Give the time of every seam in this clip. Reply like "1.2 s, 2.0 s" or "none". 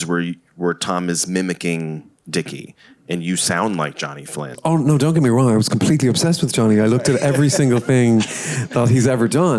4.5 s